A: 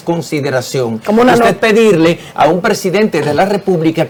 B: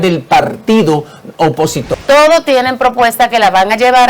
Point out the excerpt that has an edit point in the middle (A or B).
B